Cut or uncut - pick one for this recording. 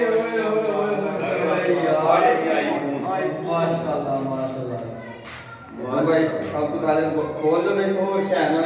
uncut